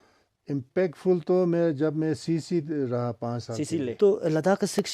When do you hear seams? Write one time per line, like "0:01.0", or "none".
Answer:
0:03.8